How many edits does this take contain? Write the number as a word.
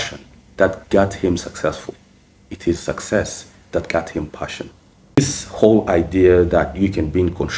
one